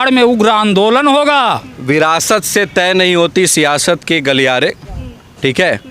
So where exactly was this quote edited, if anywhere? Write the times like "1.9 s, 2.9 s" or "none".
1.7 s